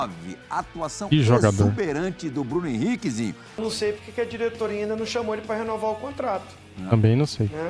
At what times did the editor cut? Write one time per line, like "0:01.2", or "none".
0:03.6